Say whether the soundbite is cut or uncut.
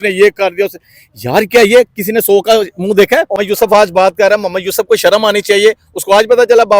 cut